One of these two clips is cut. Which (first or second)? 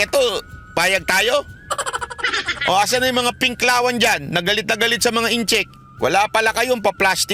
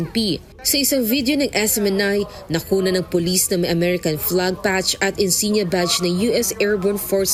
first